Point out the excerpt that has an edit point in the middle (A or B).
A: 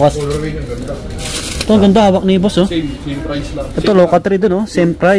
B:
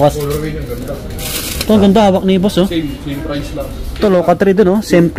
A